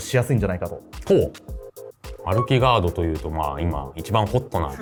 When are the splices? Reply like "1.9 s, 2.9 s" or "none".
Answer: none